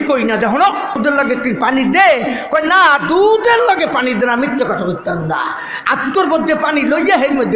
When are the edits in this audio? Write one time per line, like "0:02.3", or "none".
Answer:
0:01.0